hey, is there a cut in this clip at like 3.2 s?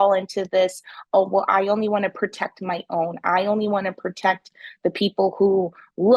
no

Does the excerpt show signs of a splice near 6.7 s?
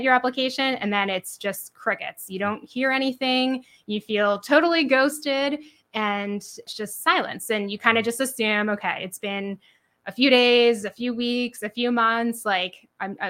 yes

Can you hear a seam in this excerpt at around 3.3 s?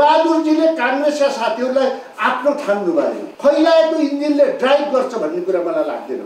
yes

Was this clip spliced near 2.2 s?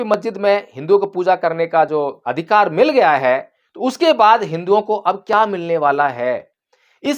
yes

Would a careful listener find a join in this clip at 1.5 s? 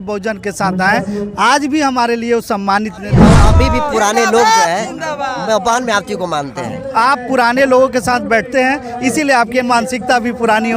no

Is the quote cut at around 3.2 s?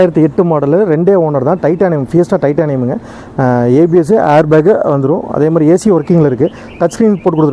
no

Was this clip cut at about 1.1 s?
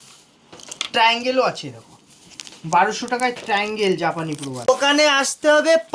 no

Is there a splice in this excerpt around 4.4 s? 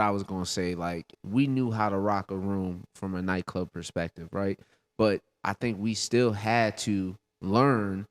no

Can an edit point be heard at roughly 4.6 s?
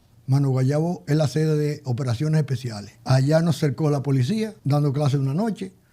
yes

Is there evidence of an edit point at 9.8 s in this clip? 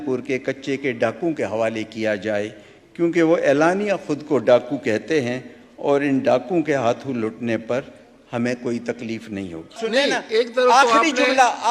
yes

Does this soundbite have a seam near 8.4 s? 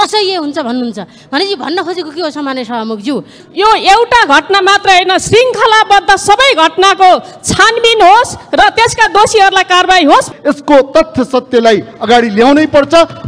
no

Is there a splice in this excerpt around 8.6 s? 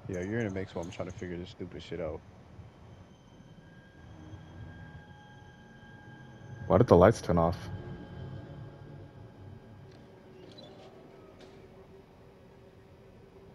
no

